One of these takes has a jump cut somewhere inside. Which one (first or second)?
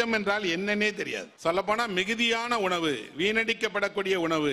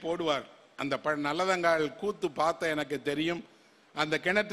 first